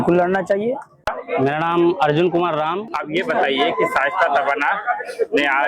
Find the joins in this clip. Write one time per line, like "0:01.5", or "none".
0:01.1
0:02.9